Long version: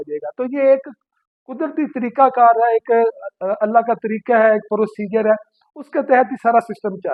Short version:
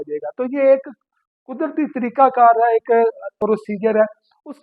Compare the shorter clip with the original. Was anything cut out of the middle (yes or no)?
yes